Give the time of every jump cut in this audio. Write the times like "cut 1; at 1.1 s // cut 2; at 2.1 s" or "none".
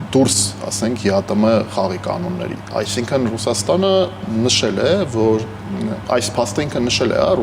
none